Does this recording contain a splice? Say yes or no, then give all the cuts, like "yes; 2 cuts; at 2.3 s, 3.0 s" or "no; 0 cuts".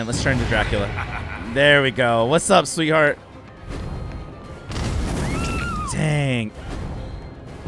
yes; 1 cut; at 6.5 s